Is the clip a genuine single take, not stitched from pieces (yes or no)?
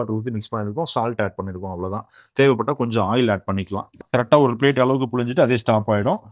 no